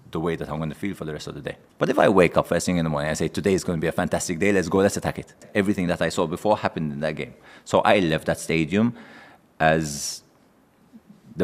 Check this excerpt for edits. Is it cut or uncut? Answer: cut